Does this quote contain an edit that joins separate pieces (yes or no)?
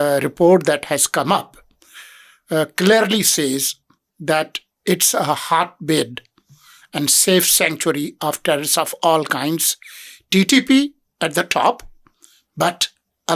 no